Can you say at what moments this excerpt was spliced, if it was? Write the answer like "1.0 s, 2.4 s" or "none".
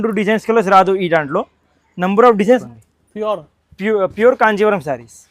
2.6 s